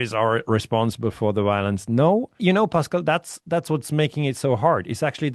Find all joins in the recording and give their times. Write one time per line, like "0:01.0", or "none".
0:02.3